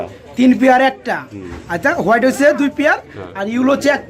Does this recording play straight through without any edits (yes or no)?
yes